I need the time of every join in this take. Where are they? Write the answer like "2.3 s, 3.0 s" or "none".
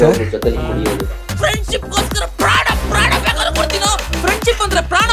none